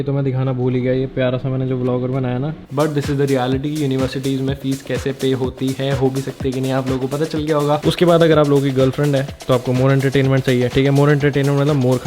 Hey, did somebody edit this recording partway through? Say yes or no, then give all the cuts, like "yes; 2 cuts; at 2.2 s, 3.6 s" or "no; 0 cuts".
yes; 2 cuts; at 2.7 s, 7.8 s